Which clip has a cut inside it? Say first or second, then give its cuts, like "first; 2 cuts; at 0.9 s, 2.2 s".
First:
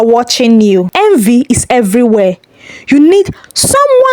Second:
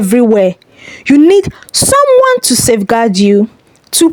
first; 1 cut; at 0.9 s